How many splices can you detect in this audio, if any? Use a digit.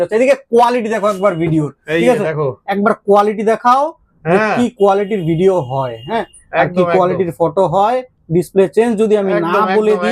0